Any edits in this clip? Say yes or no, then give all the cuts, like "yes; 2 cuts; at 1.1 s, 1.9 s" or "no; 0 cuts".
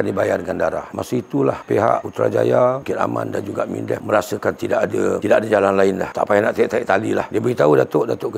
yes; 2 cuts; at 0.9 s, 7.3 s